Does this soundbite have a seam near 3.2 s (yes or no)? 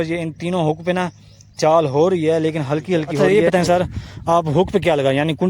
yes